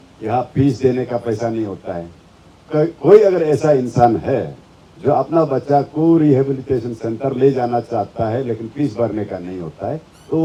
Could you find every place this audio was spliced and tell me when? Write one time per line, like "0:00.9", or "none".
none